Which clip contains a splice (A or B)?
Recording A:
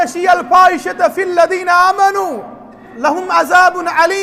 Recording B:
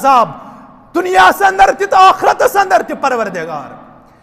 A